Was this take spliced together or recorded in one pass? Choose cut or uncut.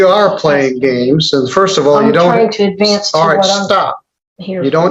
uncut